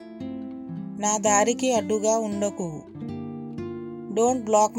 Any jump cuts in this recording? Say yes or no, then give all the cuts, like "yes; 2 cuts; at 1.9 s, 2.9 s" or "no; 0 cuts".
yes; 1 cut; at 1.0 s